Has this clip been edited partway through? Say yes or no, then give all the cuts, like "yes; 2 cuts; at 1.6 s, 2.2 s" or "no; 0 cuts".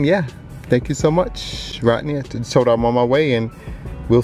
no; 0 cuts